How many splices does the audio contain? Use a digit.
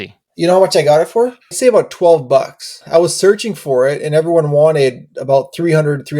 2